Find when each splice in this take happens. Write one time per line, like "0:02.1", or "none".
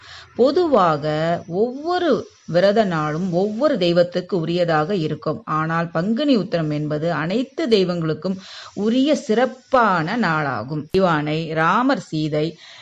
0:10.9